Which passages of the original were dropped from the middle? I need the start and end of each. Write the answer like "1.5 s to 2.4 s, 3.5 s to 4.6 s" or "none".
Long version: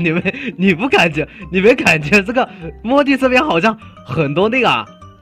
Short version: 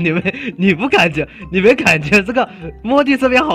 none